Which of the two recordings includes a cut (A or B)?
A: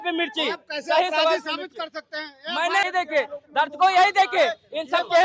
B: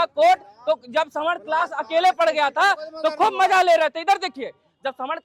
A